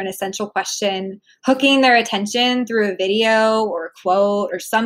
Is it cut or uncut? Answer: uncut